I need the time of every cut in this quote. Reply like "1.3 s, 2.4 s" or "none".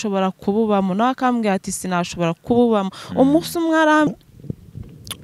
4.1 s